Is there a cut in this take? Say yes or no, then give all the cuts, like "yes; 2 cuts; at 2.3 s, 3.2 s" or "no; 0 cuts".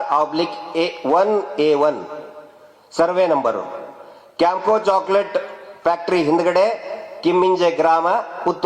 no; 0 cuts